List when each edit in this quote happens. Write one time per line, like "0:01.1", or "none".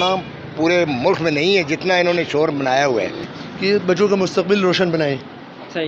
0:03.3

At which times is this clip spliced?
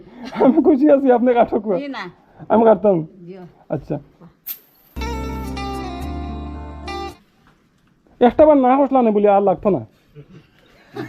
0:07.1

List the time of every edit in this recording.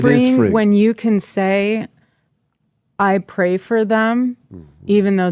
none

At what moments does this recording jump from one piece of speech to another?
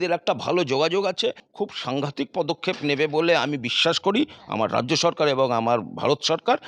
0:01.4

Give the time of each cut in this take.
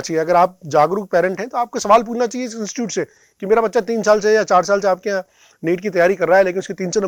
none

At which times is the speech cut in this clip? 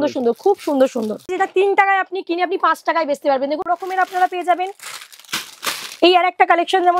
0:01.3
0:03.6

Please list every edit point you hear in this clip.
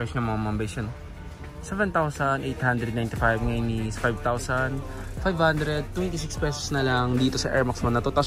none

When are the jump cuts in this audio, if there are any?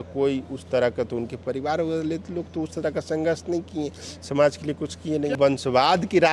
0:05.4

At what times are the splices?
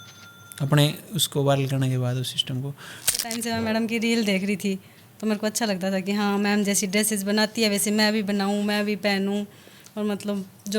0:03.1

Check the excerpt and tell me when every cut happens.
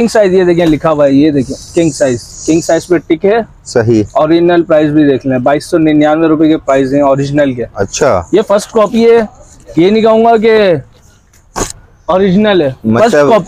none

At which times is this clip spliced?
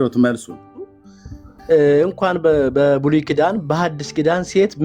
0:01.0

